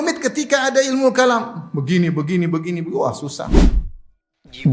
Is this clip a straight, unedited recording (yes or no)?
no